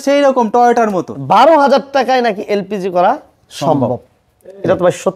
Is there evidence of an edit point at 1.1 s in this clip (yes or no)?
yes